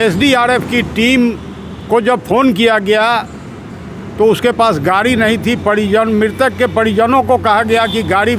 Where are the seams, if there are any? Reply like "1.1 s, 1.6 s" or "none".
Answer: none